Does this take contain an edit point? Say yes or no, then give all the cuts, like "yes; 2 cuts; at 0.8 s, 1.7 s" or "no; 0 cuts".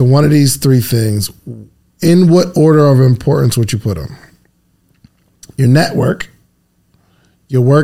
no; 0 cuts